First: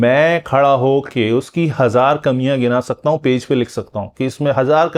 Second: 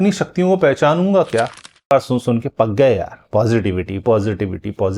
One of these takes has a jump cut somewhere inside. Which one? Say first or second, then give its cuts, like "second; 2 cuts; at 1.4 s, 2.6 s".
second; 1 cut; at 1.8 s